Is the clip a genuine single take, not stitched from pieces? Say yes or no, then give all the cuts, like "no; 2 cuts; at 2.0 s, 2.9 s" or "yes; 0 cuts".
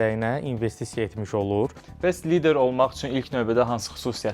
no; 1 cut; at 1.8 s